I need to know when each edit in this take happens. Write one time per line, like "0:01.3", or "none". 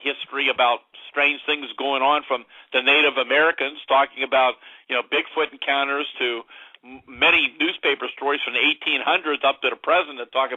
none